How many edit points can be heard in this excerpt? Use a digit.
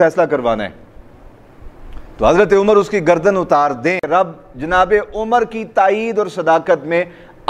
1